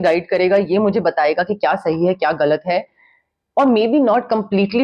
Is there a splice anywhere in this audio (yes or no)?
no